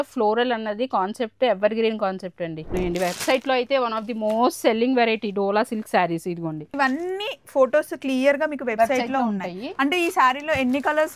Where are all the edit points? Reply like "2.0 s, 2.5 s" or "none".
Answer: 2.7 s, 6.7 s